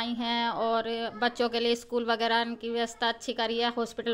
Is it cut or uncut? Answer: uncut